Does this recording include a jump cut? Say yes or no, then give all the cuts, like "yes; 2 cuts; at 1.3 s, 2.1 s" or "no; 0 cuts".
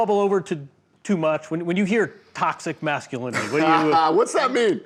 no; 0 cuts